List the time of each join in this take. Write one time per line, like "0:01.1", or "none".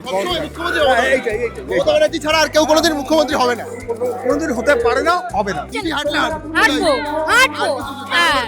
0:05.7

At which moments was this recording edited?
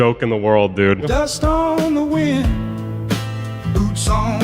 0:01.1

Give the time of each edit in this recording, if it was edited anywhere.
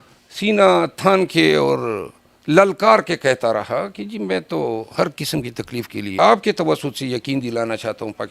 0:06.0

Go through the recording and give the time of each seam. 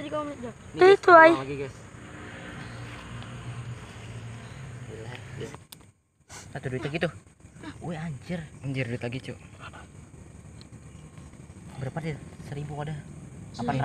0:05.5

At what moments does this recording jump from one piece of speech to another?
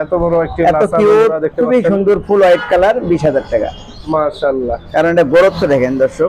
0:04.0

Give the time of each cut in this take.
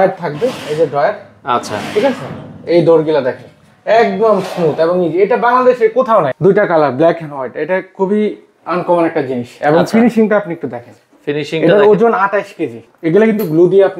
0:06.3
0:12.9

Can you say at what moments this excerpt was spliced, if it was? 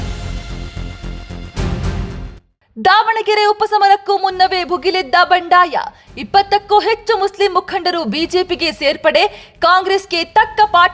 none

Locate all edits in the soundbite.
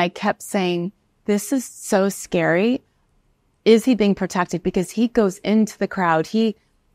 none

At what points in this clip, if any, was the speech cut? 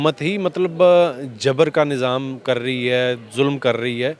none

